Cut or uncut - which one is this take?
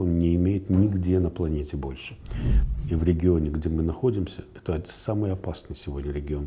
cut